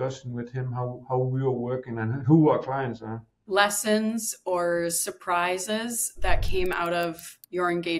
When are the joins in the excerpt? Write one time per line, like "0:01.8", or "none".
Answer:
0:03.4

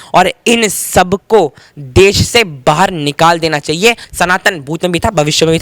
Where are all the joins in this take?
0:04.1

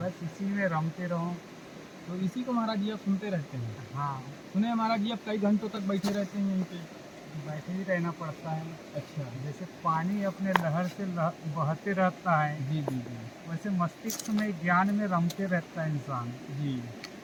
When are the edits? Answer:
none

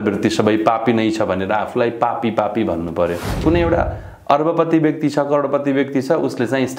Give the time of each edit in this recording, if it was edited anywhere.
0:03.4

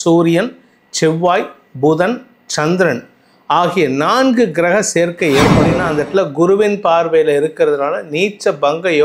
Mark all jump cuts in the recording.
0:05.8

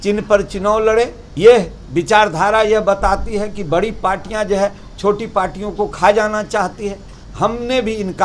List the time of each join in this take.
0:01.2
0:07.2

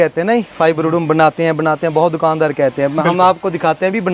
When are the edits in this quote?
none

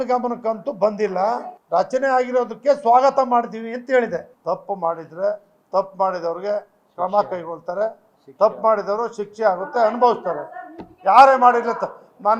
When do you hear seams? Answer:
0:01.5
0:04.3

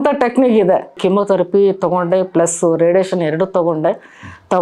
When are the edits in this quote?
0:01.0

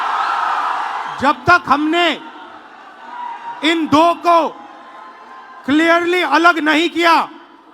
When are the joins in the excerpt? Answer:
0:01.1

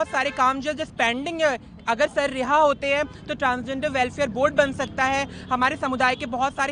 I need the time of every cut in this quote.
none

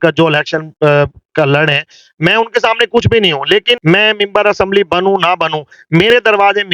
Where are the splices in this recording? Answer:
0:03.7

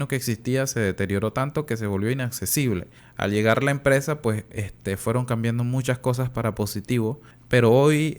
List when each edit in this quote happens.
0:03.0
0:07.3

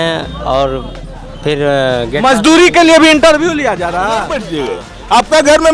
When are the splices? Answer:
0:04.5

